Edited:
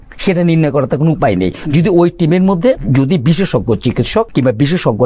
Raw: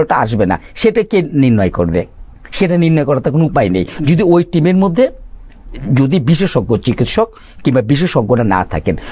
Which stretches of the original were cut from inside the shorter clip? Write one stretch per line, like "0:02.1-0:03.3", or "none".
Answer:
0:05.2-0:05.8
0:07.3-0:07.6